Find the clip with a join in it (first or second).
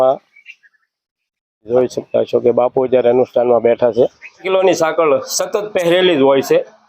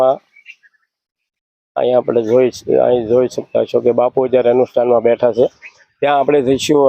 first